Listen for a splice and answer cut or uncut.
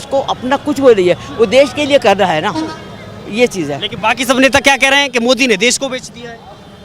uncut